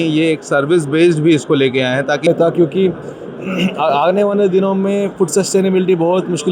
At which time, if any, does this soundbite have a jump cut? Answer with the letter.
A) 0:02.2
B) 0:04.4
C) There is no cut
A